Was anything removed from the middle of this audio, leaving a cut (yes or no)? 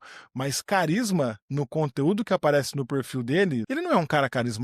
yes